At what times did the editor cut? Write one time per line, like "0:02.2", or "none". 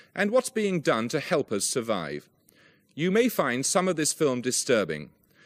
0:01.0